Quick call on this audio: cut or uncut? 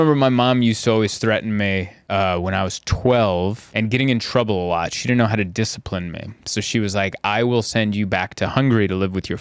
cut